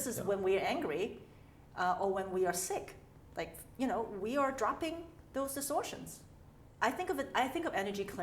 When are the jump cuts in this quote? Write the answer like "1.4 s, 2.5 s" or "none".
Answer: 6.6 s